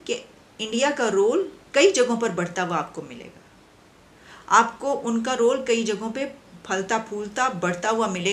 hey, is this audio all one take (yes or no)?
yes